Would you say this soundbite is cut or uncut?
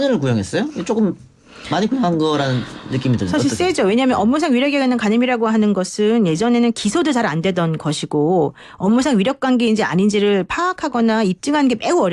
uncut